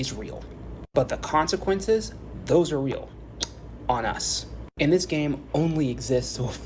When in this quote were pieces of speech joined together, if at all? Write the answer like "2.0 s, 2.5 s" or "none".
none